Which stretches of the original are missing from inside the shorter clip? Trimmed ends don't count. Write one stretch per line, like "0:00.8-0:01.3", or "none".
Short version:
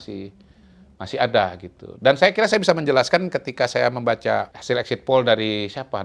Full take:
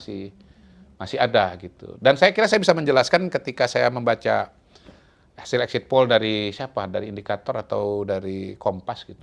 0:04.5-0:05.4